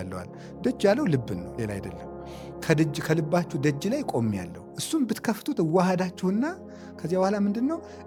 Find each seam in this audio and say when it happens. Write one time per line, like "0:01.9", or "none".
none